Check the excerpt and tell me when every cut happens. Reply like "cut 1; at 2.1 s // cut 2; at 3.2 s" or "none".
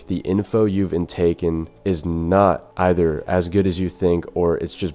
cut 1; at 1.7 s // cut 2; at 2.7 s